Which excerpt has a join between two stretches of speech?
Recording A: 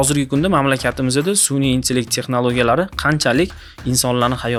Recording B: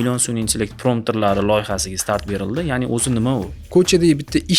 B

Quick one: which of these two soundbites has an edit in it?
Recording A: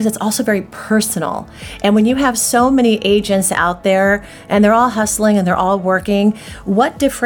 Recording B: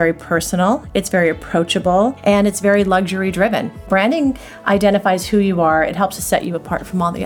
B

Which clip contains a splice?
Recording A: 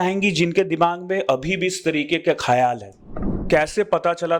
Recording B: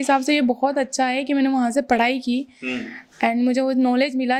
A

